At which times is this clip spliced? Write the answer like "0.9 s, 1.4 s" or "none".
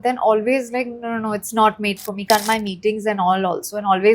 2.2 s

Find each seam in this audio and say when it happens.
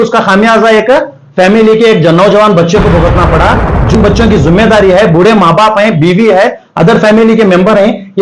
3.9 s

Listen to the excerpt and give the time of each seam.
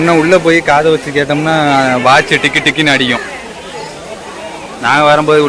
none

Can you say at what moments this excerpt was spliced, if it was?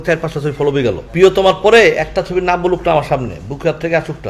1.0 s

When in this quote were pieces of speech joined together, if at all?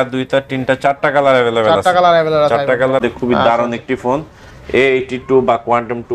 3.0 s

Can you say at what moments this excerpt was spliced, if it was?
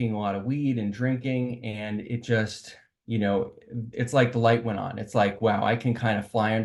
none

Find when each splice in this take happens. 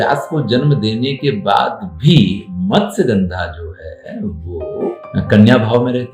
5.0 s

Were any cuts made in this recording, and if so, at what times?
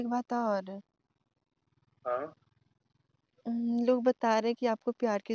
none

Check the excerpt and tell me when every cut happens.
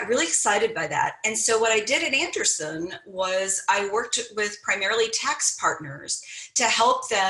none

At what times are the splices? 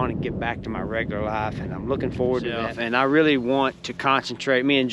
2.7 s

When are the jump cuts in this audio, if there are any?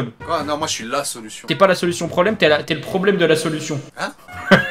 1.4 s

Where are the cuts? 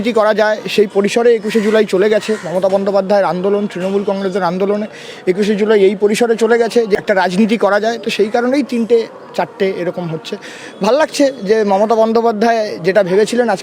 7.0 s

